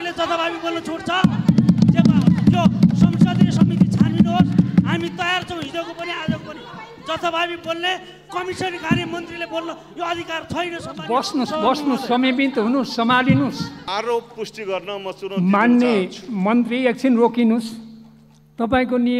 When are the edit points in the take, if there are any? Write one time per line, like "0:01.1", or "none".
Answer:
0:13.8